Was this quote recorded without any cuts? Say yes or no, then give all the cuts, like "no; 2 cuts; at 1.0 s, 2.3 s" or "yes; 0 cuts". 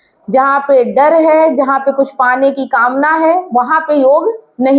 yes; 0 cuts